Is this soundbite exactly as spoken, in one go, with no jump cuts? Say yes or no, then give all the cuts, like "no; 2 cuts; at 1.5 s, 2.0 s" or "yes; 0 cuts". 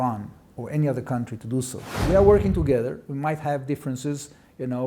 no; 1 cut; at 2.0 s